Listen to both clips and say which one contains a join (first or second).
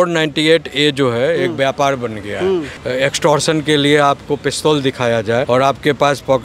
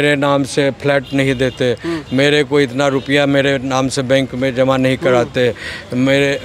first